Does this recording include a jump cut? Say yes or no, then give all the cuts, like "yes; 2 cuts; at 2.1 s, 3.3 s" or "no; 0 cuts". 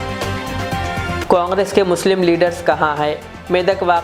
yes; 1 cut; at 1.2 s